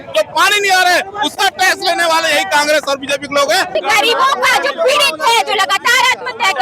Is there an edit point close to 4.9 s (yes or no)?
no